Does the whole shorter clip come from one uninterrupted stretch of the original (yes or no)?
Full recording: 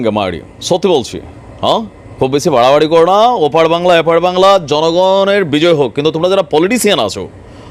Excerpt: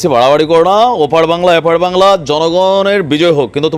yes